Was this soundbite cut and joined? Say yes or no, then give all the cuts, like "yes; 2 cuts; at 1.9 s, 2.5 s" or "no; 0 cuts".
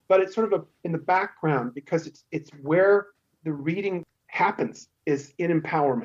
yes; 1 cut; at 4.2 s